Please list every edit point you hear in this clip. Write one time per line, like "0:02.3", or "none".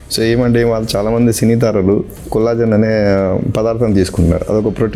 none